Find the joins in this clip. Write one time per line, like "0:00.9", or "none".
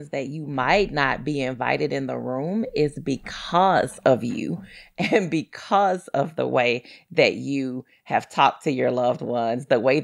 none